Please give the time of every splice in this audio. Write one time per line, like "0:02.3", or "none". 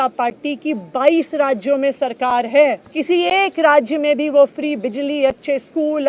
0:02.8